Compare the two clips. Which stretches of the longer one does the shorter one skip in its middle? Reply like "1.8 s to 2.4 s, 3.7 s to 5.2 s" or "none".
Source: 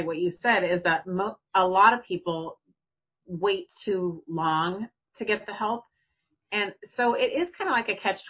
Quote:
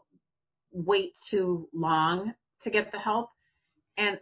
none